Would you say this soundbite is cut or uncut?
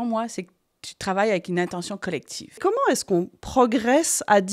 cut